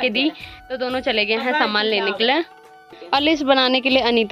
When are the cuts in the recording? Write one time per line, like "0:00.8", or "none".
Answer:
none